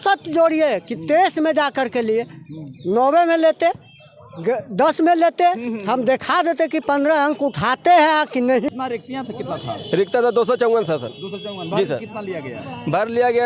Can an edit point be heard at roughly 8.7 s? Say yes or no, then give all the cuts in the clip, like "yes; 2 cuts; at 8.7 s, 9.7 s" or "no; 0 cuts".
yes; 1 cut; at 8.7 s